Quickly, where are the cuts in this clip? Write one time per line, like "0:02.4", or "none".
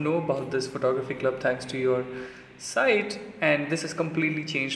none